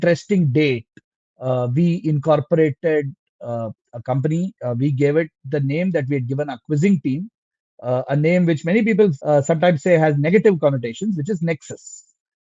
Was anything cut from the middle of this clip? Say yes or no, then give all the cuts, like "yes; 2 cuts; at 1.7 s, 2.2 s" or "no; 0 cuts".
no; 0 cuts